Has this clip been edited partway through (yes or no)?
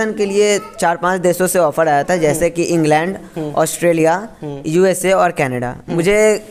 no